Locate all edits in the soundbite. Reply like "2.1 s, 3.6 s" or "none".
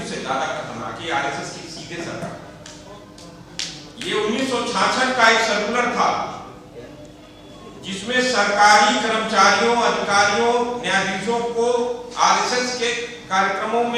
none